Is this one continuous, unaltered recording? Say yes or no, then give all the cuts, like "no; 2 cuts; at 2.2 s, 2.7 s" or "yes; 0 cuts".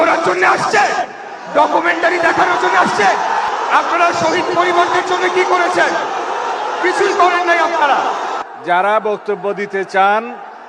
no; 2 cuts; at 3.5 s, 8.4 s